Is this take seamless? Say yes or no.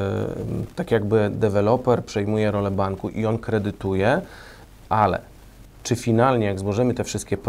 yes